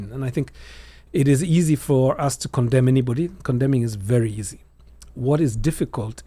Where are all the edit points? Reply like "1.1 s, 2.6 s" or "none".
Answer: none